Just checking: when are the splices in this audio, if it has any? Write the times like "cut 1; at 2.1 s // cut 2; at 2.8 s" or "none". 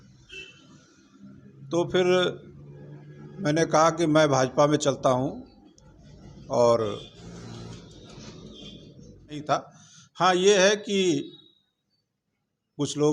cut 1; at 9.4 s